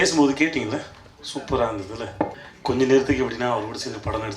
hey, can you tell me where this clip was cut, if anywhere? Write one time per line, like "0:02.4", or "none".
0:02.4